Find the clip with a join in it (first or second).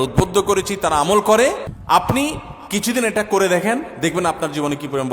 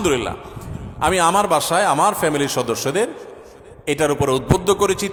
first